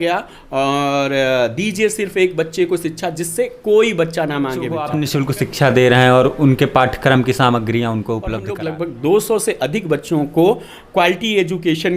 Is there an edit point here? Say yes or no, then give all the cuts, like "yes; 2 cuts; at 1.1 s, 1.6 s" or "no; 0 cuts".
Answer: yes; 2 cuts; at 4.9 s, 8.5 s